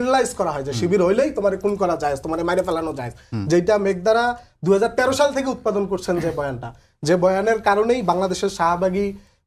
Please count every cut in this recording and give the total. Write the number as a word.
zero